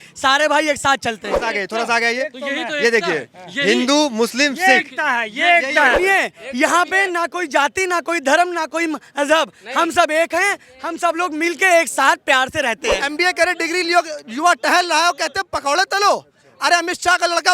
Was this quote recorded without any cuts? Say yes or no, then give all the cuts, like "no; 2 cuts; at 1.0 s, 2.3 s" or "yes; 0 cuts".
no; 3 cuts; at 1.5 s, 6.1 s, 13.0 s